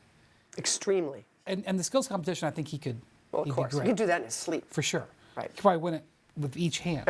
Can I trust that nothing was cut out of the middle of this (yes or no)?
no